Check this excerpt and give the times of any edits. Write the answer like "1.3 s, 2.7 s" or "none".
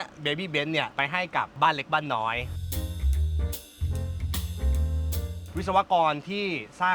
1.4 s, 2.6 s, 5.5 s